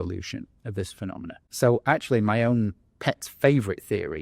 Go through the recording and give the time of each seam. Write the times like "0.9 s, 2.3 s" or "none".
1.4 s

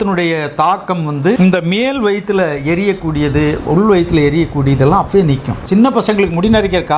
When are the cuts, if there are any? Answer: 1.4 s, 5.5 s

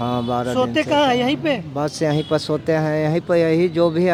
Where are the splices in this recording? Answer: none

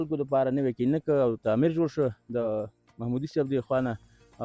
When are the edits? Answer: 2.5 s

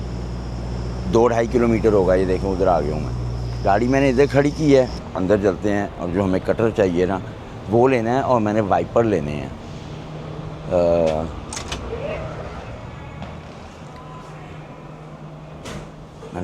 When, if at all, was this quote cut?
5.1 s

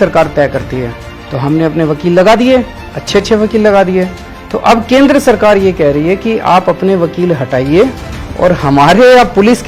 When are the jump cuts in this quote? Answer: none

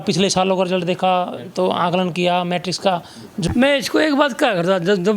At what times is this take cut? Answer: 3.4 s

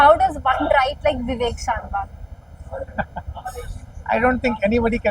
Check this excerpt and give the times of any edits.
none

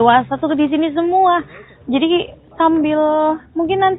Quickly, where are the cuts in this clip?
1.2 s

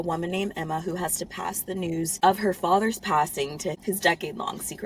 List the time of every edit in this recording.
2.1 s, 3.7 s

